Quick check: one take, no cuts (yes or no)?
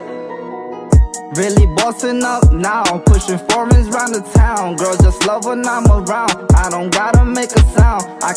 yes